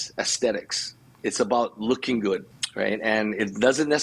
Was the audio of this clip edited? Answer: yes; 1 cut; at 2.6 s

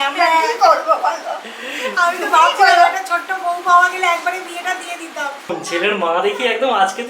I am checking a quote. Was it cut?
yes; 1 cut; at 5.5 s

